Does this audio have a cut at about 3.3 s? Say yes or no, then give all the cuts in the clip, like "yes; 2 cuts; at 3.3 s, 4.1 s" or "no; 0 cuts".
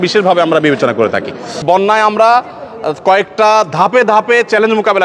no; 1 cut; at 1.6 s